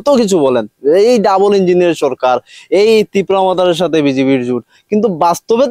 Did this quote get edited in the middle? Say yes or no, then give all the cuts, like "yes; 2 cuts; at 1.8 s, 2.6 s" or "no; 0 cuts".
no; 0 cuts